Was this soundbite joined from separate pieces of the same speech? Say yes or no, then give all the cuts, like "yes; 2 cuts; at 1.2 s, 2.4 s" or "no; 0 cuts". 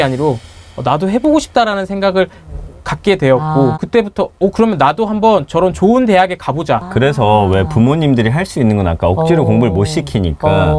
yes; 1 cut; at 3.8 s